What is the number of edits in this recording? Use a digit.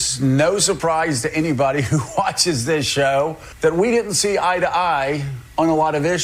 1